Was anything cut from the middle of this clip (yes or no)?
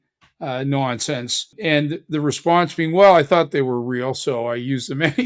yes